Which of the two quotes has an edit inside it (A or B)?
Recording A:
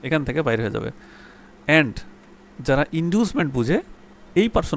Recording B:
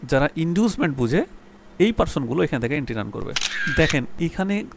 B